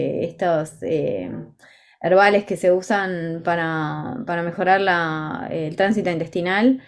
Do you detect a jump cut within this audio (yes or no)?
no